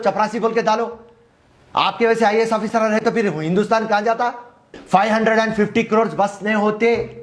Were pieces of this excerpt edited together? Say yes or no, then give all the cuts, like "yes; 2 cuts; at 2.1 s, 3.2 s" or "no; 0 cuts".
yes; 1 cut; at 4.7 s